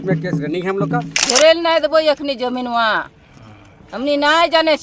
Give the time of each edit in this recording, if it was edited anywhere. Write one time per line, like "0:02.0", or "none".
0:01.1